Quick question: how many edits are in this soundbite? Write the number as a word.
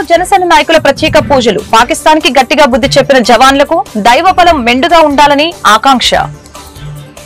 one